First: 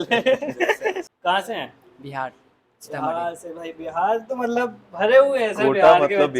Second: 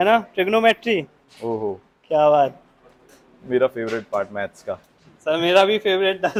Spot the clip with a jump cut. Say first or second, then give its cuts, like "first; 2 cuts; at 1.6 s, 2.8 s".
first; 1 cut; at 1.1 s